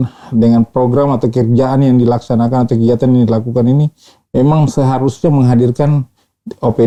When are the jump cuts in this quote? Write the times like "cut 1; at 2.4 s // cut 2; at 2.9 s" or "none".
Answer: none